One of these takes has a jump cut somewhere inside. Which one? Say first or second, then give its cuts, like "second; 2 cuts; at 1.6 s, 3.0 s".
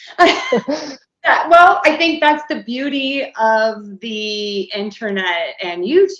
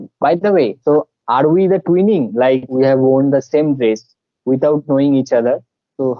second; 1 cut; at 2.7 s